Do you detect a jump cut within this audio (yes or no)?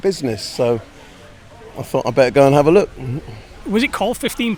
no